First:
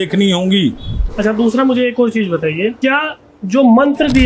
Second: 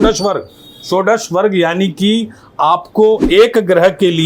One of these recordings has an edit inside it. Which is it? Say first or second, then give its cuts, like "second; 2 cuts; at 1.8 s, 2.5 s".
first; 2 cuts; at 1.0 s, 2.8 s